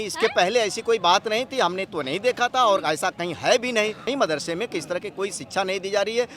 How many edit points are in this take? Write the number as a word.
one